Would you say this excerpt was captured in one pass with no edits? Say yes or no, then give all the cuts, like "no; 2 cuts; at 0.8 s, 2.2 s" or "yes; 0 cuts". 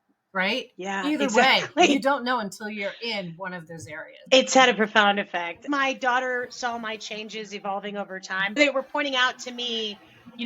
no; 3 cuts; at 4.2 s, 5.6 s, 8.6 s